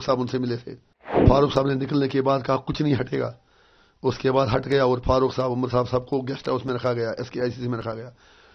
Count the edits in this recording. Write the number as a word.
one